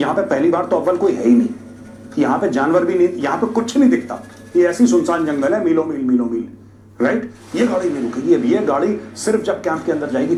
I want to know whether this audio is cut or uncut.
uncut